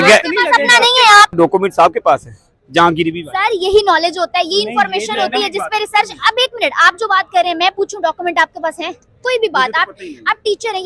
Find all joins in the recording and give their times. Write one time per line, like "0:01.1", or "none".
0:01.3